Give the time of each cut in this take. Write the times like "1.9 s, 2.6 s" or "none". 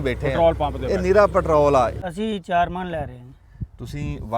2.0 s